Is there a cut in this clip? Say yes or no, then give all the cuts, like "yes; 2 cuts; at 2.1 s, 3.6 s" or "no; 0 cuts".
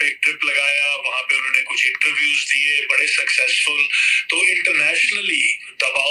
no; 0 cuts